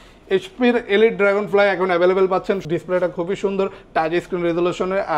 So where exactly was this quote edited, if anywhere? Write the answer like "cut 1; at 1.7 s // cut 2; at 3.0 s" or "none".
cut 1; at 2.6 s